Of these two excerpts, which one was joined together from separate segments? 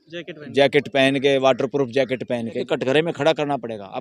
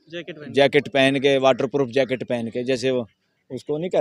first; 1 cut; at 2.6 s

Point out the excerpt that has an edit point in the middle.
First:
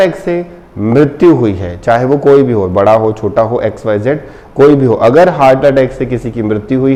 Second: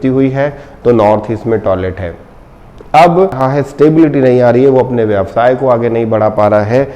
second; 1 cut; at 3.4 s

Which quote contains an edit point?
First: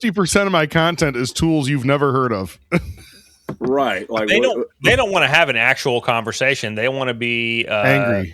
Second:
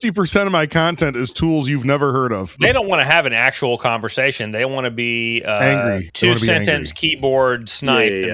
second; 2 cuts; at 2.5 s, 6.1 s

